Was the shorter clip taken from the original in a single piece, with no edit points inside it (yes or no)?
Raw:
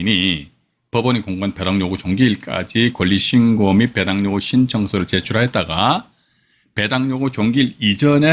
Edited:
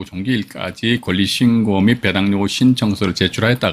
yes